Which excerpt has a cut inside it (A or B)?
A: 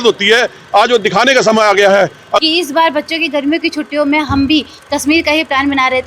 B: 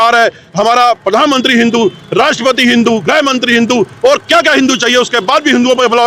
A